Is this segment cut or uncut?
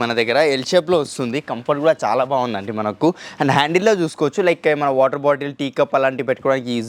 uncut